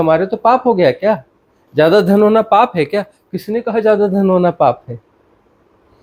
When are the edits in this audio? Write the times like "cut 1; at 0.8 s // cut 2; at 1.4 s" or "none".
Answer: none